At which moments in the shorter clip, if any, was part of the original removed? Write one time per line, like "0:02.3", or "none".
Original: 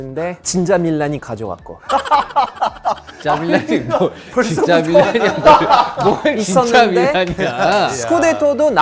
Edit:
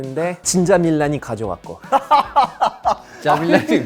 none

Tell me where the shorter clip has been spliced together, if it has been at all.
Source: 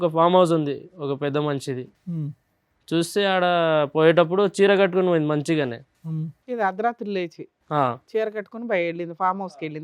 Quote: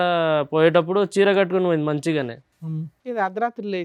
none

